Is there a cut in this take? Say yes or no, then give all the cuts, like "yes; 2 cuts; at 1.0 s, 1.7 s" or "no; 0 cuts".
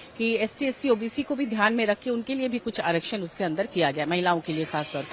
no; 0 cuts